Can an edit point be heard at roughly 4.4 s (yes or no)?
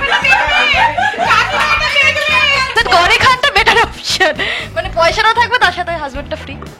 no